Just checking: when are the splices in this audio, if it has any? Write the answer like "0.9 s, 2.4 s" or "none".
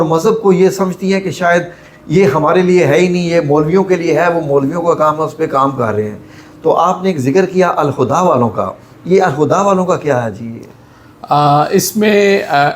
none